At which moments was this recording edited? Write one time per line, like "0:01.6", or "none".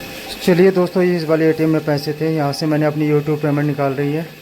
none